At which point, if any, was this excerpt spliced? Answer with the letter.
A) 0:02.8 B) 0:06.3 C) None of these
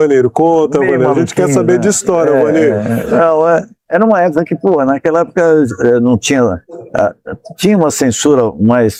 C